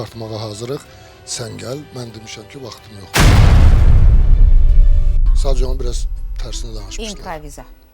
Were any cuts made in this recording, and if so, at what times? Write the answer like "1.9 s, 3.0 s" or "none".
none